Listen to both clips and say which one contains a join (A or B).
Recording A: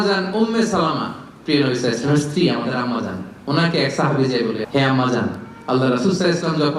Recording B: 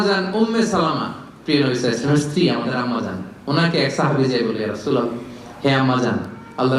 A